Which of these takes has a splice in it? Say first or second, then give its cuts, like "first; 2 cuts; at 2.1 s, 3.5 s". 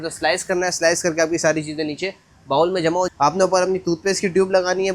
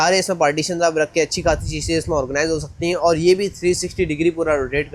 first; 1 cut; at 3.1 s